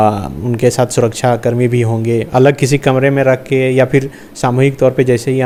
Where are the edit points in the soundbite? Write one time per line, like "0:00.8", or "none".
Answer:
none